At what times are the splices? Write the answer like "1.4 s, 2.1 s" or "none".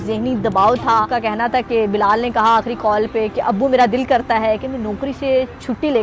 1.1 s